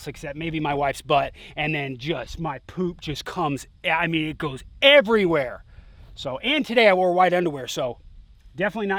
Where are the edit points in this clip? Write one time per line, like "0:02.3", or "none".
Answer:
none